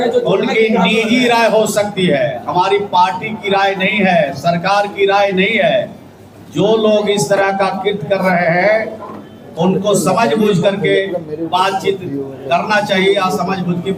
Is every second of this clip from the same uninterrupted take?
yes; 0 cuts

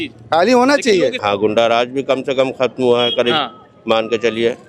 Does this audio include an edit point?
yes; 1 cut; at 1.2 s

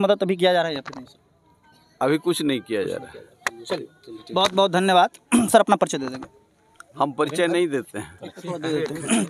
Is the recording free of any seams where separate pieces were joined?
yes; 0 cuts

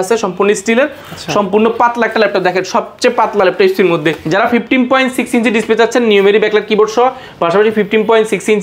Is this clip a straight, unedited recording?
no; 1 cut; at 4.2 s

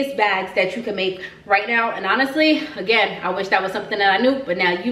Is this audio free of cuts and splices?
yes; 0 cuts

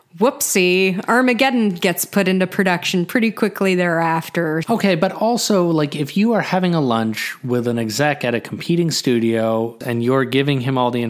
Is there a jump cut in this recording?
yes; 2 cuts; at 4.6 s, 9.8 s

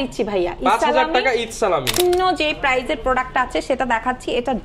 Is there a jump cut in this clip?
yes; 1 cut; at 2.0 s

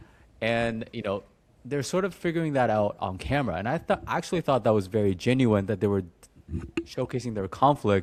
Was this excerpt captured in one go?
yes; 0 cuts

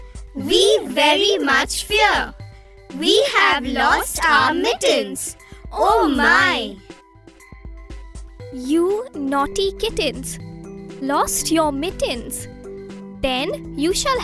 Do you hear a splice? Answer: yes; 2 cuts; at 7.1 s, 8.5 s

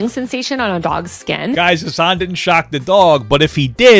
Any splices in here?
yes; 1 cut; at 1.6 s

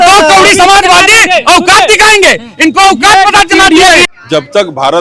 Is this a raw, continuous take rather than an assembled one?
no; 1 cut; at 4.0 s

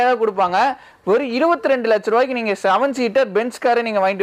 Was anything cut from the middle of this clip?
no; 0 cuts

